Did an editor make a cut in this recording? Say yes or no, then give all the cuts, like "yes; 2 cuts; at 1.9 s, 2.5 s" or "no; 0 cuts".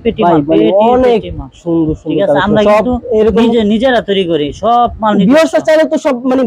no; 0 cuts